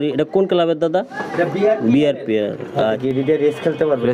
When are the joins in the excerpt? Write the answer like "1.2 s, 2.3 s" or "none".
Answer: 3.0 s